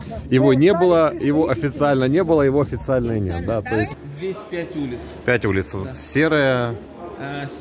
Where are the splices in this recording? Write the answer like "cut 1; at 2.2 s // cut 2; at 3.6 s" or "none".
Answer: cut 1; at 4.0 s